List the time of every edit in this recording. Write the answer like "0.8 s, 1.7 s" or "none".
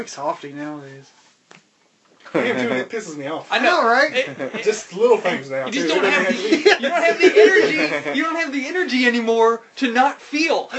none